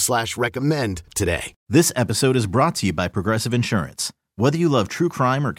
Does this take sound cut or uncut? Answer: cut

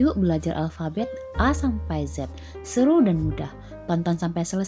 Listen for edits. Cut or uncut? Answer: uncut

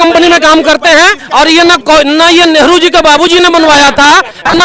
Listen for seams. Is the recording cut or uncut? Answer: uncut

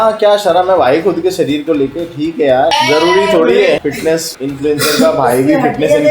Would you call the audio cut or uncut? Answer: cut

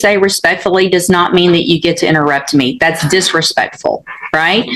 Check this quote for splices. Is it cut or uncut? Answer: uncut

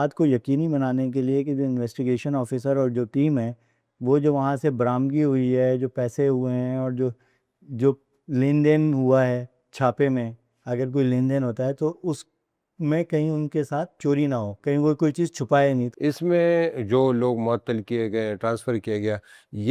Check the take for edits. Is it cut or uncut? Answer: cut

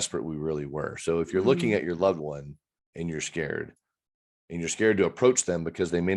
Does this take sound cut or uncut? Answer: uncut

